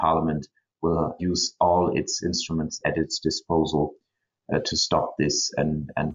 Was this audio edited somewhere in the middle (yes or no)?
yes